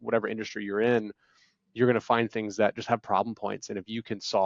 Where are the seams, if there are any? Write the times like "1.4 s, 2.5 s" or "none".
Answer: none